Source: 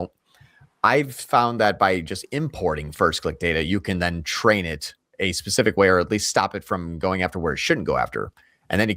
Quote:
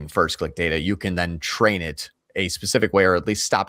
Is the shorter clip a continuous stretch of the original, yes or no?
yes